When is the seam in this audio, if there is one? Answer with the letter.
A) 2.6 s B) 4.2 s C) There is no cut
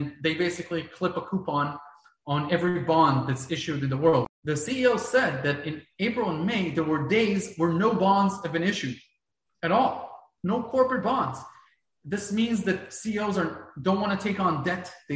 B